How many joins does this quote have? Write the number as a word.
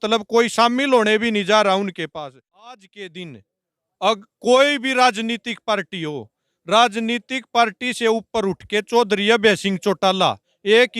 one